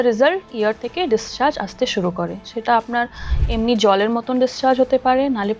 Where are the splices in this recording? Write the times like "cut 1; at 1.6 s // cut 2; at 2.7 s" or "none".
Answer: none